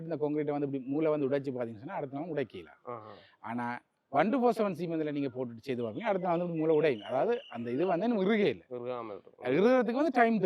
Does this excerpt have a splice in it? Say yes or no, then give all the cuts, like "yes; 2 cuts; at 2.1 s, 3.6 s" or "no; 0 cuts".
no; 0 cuts